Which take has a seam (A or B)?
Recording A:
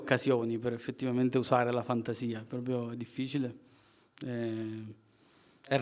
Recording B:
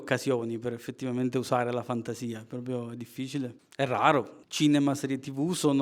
B